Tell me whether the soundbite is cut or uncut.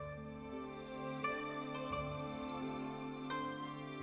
uncut